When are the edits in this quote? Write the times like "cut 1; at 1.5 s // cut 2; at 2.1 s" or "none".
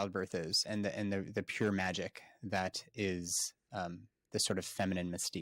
none